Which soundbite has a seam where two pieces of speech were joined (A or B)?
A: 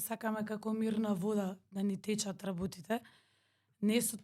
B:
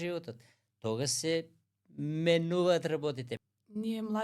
B